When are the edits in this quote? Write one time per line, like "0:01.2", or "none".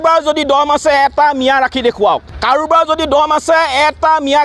0:02.3